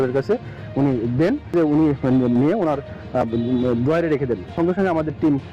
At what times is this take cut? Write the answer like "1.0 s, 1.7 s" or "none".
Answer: 1.5 s, 4.5 s